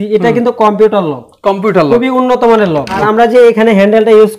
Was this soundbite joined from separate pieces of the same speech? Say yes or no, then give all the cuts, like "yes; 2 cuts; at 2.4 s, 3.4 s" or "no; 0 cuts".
yes; 1 cut; at 3.0 s